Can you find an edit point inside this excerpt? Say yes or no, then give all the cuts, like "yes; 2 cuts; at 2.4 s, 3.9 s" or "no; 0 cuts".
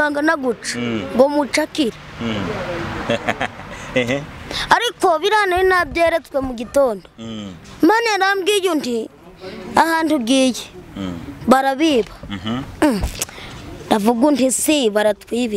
no; 0 cuts